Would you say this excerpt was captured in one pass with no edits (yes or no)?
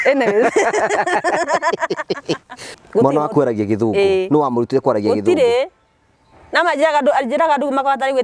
no